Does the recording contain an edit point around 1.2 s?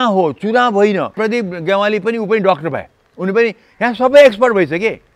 yes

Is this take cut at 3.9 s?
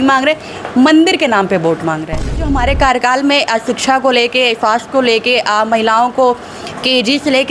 no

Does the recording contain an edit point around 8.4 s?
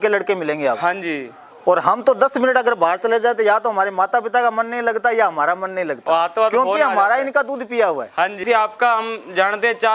yes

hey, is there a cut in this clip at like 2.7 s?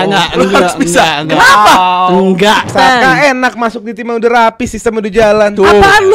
yes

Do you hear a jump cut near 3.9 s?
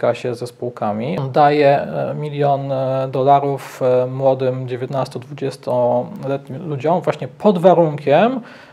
no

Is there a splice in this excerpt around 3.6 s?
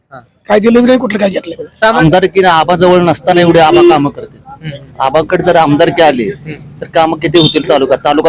no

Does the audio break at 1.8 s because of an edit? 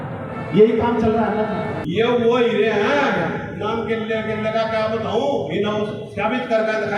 yes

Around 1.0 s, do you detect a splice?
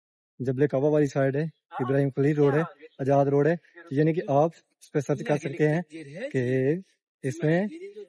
no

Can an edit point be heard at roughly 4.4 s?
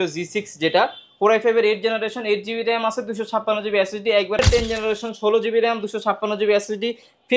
yes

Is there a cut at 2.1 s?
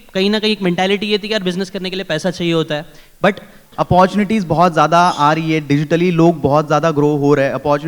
no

